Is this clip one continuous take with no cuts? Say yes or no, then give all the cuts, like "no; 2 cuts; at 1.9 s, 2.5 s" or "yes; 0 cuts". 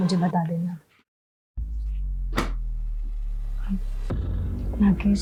yes; 0 cuts